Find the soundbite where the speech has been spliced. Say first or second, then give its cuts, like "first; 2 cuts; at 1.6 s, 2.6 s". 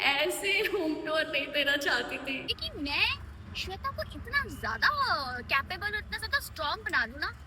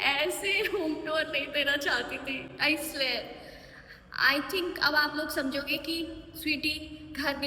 first; 1 cut; at 2.5 s